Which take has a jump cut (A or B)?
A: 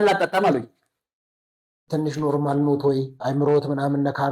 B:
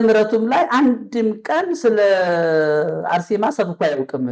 A